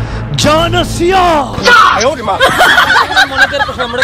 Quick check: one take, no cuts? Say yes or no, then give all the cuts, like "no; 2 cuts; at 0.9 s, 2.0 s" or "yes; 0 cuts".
yes; 0 cuts